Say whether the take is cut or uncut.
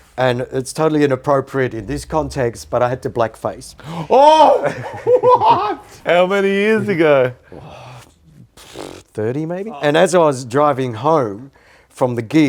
cut